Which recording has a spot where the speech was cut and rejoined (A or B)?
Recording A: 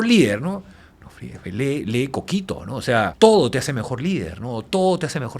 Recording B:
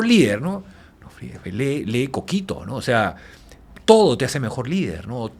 A